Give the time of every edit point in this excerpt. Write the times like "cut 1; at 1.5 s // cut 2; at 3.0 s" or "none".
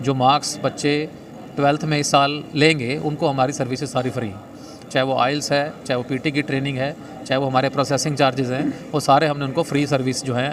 none